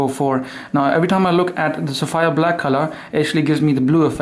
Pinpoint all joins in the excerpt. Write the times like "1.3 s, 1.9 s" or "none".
2.9 s